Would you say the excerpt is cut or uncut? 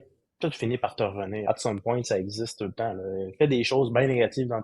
cut